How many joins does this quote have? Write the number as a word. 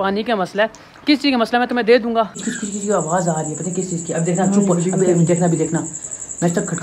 one